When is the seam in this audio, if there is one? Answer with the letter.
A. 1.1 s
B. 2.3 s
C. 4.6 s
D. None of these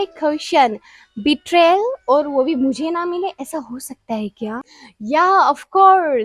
D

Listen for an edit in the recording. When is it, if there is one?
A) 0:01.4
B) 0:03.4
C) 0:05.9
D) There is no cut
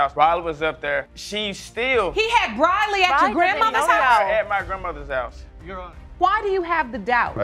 C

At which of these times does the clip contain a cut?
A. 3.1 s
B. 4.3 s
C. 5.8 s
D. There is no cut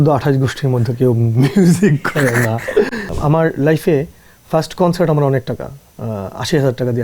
A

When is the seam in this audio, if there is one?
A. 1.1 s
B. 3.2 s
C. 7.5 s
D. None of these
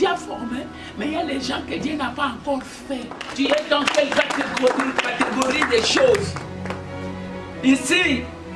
B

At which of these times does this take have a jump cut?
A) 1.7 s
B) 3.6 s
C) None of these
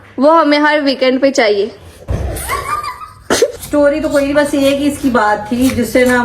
B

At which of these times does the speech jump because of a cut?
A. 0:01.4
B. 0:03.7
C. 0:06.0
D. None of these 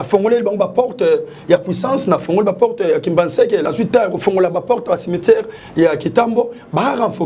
B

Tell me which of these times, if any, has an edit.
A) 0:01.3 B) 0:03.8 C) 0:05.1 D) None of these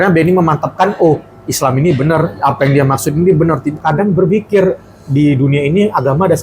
B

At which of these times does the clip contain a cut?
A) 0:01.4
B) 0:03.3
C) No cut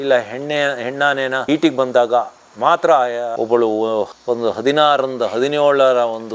B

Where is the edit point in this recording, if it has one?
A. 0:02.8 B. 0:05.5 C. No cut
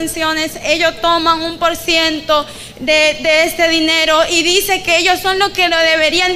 C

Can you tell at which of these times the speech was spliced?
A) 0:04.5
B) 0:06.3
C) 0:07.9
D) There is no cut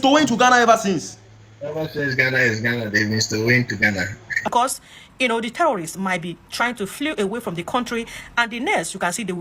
A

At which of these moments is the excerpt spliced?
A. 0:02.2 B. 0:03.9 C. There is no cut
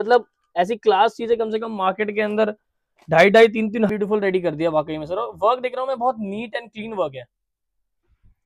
B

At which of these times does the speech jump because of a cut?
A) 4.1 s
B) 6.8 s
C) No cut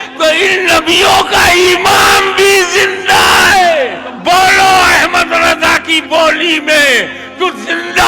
A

